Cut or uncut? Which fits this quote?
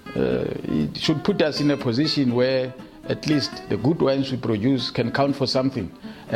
uncut